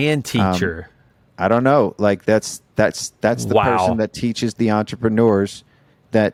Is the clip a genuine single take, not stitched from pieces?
yes; 0 cuts

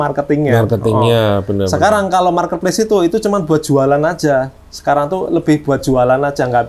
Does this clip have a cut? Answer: no; 0 cuts

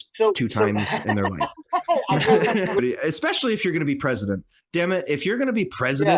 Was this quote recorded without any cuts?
no; 1 cut; at 2.7 s

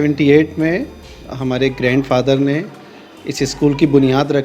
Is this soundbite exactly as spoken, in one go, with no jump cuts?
yes; 0 cuts

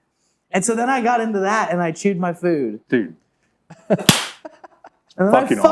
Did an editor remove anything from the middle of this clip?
yes; 1 cut; at 2.8 s

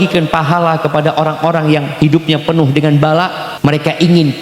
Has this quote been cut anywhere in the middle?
yes; 1 cut; at 3.4 s

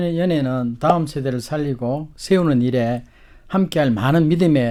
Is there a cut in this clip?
no; 0 cuts

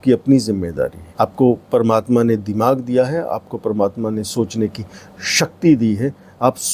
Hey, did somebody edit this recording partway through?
yes; 1 cut; at 1.0 s

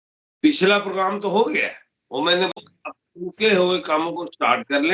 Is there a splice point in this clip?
yes; 1 cut; at 2.5 s

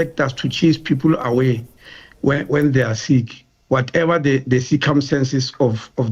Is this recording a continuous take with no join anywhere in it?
yes; 0 cuts

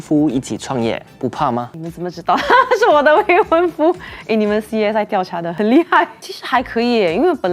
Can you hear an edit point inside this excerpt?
no; 0 cuts

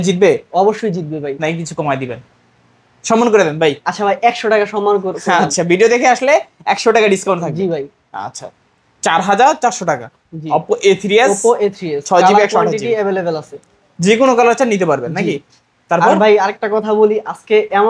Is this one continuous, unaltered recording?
yes; 0 cuts

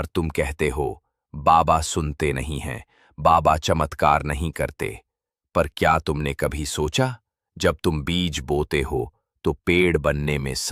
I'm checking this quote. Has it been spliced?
no; 0 cuts

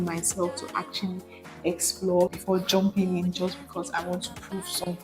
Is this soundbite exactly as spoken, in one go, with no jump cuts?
no; 1 cut; at 2.4 s

